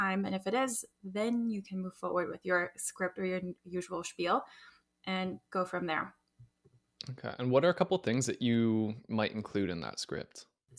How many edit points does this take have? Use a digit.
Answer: 0